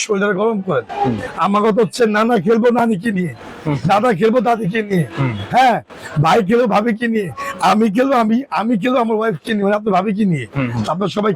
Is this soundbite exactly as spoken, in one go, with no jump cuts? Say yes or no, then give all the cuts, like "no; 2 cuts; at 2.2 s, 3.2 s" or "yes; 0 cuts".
no; 1 cut; at 1.3 s